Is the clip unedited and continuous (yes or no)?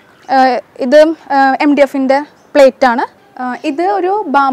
no